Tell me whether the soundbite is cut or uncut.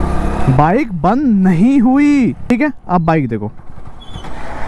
cut